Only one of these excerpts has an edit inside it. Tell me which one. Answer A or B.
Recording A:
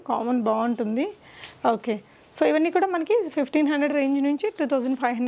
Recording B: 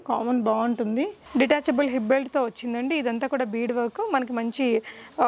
B